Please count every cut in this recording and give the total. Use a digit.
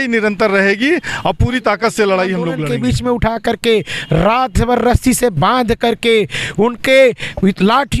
1